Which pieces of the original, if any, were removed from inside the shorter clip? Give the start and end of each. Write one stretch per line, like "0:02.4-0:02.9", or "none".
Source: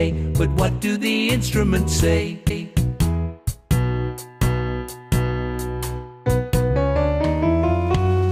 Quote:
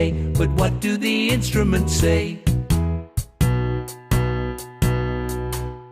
0:02.4-0:02.7